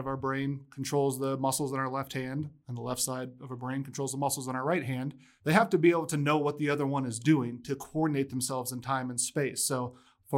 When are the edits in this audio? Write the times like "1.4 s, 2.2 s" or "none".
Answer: 5.2 s